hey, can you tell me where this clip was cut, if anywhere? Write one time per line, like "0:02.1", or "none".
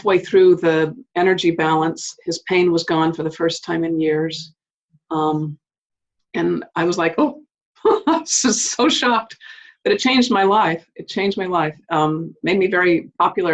none